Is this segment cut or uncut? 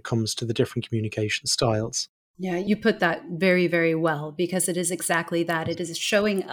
cut